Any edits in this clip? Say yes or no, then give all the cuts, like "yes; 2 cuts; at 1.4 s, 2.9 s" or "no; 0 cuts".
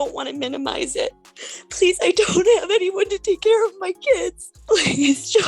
yes; 2 cuts; at 1.3 s, 4.5 s